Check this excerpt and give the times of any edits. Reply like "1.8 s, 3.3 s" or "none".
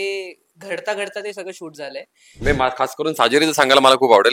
2.3 s